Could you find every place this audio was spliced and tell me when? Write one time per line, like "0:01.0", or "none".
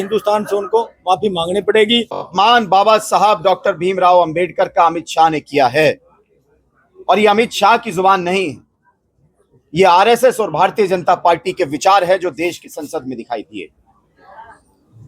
0:02.3